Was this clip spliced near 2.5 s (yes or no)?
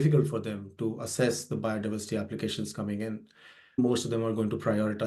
no